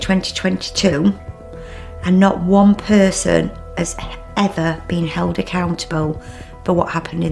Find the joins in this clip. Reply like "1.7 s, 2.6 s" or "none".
none